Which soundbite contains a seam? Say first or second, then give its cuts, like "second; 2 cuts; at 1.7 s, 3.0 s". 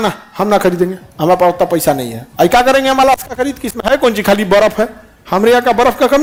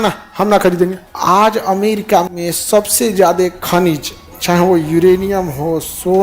second; 1 cut; at 1.0 s